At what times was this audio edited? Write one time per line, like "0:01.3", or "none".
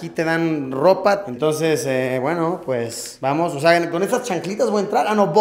0:01.3